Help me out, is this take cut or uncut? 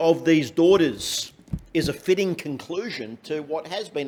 uncut